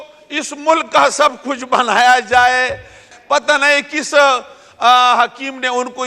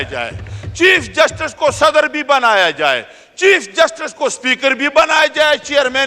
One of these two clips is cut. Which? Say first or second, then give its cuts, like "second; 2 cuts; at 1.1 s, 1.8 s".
first; 1 cut; at 3.1 s